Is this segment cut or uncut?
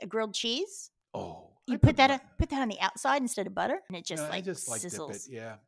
cut